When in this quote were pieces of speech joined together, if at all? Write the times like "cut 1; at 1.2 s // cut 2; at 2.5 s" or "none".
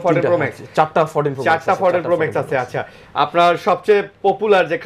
none

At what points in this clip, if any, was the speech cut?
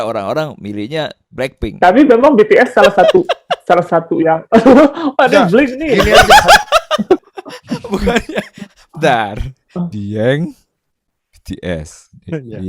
cut 1; at 7.2 s

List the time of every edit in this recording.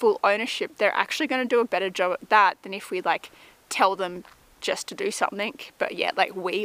none

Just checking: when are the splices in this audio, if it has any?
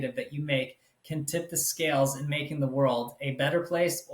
none

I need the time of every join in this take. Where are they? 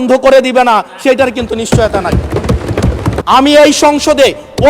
cut 1; at 3.1 s

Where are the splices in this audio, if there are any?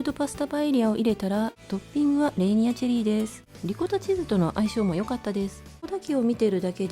cut 1; at 1.6 s // cut 2; at 3.5 s // cut 3; at 5.9 s

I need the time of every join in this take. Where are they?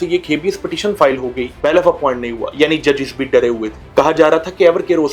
cut 1; at 1.5 s // cut 2; at 3.8 s

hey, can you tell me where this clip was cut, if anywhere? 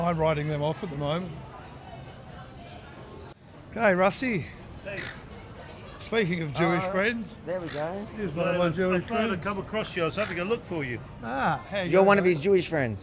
cut 1; at 3.3 s

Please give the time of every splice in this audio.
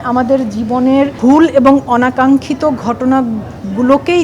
cut 1; at 1.1 s

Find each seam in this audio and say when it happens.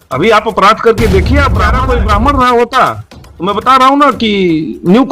cut 1; at 1.6 s

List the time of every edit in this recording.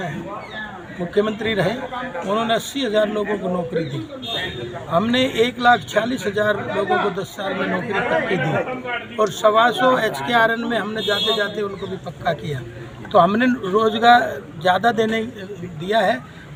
none

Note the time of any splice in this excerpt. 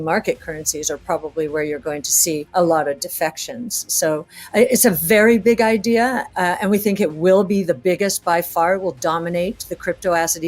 cut 1; at 2.5 s

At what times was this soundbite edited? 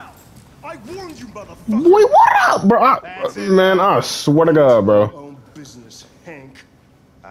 none

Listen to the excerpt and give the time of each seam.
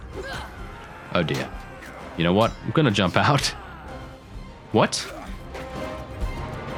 none

